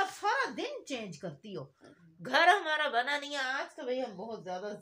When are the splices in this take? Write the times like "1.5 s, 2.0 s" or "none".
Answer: none